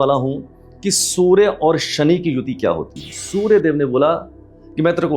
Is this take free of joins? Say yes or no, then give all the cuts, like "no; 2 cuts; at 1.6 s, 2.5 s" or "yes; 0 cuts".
no; 1 cut; at 3.1 s